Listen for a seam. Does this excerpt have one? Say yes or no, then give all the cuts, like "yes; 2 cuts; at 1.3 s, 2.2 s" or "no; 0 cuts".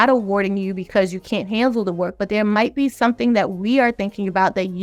no; 0 cuts